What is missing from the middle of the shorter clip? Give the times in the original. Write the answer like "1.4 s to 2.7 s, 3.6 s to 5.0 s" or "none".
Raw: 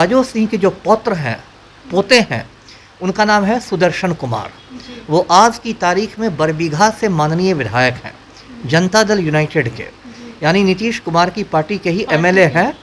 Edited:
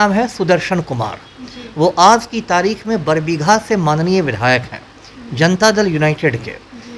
none

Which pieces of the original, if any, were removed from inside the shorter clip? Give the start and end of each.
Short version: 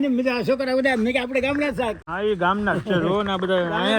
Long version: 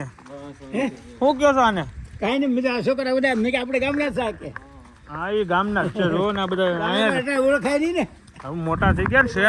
4.4 s to 5.1 s

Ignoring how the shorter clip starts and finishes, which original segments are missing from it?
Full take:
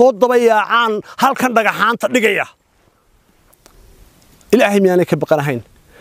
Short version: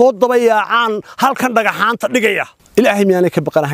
2.6 s to 4.3 s

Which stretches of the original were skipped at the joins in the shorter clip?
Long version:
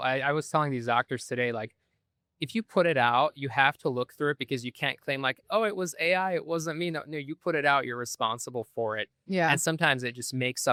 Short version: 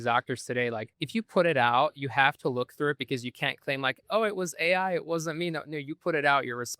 1.8 s to 2.4 s

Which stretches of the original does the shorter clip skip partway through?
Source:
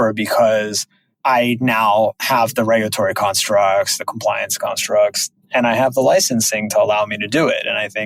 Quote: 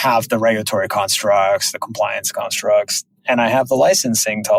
none

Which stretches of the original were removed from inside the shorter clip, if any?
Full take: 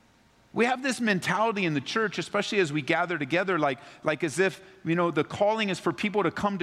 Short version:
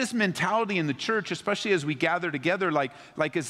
none

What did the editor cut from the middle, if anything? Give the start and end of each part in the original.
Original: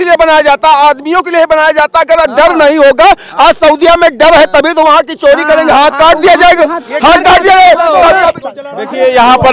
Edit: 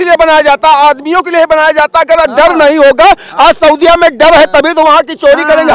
none

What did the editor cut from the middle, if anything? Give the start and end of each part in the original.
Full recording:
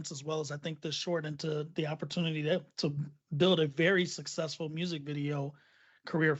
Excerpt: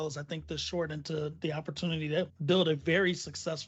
2.7 s to 3.3 s

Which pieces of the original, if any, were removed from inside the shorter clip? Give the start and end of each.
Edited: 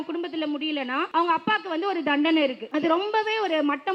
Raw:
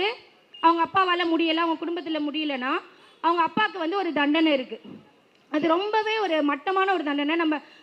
2.8 s to 3.2 s, 4.7 s to 5.4 s

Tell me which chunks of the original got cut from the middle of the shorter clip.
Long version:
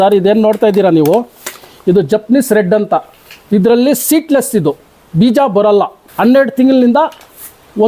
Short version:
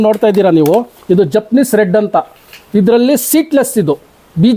1.3 s to 1.7 s

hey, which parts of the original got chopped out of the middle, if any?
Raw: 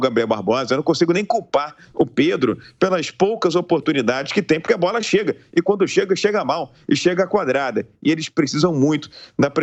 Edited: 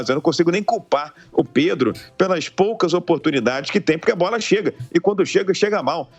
none

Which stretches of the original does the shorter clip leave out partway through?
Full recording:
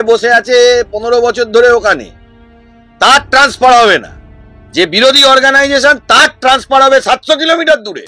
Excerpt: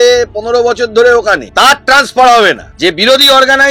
2.0 s to 2.9 s, 4.1 s to 4.6 s

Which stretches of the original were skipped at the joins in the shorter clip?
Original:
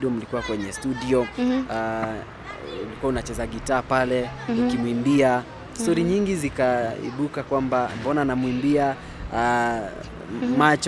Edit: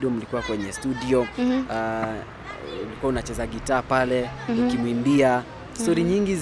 none

